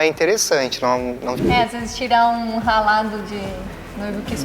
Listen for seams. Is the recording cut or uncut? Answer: cut